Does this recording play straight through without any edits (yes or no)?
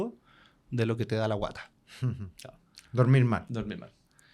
yes